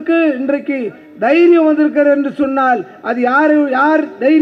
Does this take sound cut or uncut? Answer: uncut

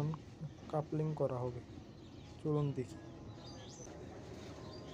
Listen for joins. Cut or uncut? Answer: cut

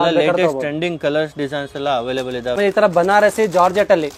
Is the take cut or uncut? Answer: cut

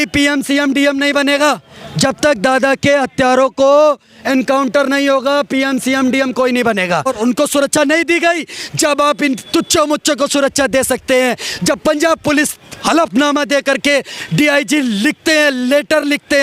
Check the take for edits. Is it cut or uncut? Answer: cut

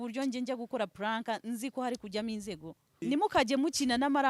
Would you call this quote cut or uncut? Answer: cut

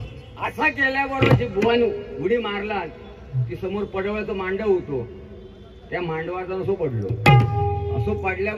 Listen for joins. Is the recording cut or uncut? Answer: uncut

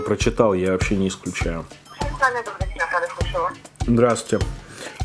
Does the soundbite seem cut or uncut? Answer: cut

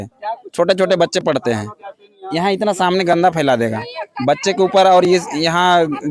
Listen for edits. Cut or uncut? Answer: uncut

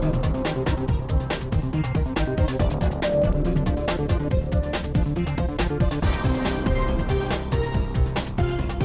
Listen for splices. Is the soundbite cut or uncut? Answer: uncut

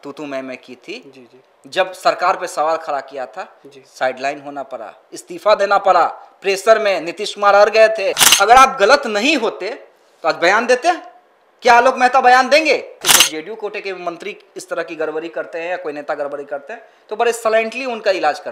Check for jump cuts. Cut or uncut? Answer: cut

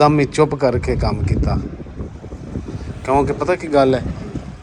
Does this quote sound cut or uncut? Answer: uncut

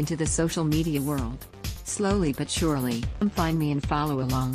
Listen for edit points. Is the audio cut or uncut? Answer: cut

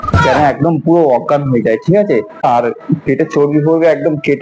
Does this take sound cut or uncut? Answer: cut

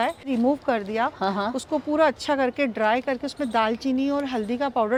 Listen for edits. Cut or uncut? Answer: uncut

